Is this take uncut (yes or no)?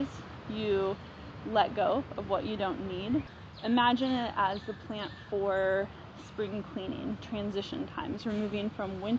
no